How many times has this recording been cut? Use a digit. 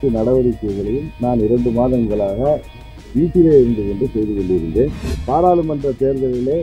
1